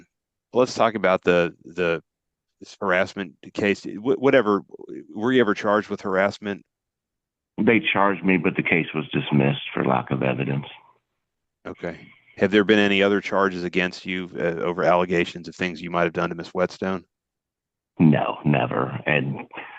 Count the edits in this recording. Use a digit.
0